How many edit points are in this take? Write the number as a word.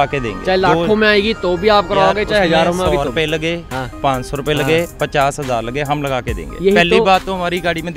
zero